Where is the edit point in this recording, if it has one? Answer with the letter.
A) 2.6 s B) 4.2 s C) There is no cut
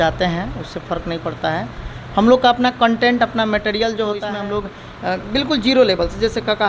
B